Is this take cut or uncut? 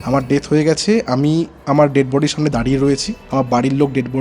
cut